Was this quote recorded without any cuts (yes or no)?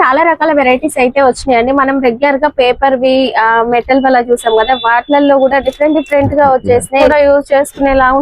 no